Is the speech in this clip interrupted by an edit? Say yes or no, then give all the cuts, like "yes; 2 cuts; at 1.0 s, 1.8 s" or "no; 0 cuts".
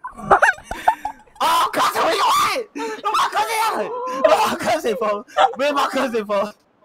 no; 0 cuts